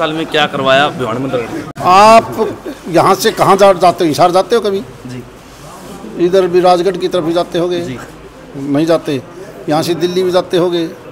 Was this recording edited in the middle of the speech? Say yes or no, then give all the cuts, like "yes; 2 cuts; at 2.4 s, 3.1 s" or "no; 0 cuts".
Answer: no; 0 cuts